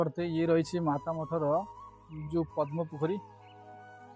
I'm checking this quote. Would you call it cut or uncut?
cut